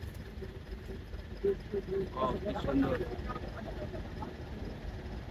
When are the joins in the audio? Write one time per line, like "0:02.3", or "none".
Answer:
none